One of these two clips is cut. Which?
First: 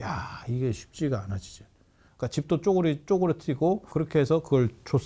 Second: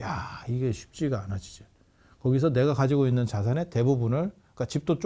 first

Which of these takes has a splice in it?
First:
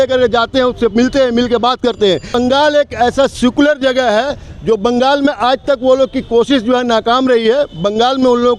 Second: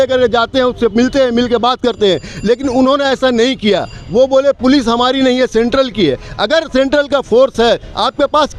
first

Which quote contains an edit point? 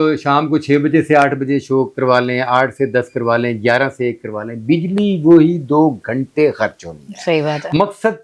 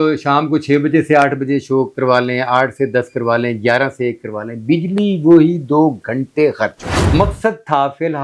second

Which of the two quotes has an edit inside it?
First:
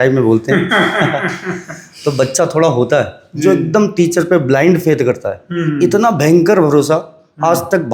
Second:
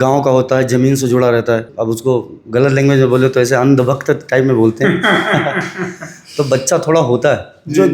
second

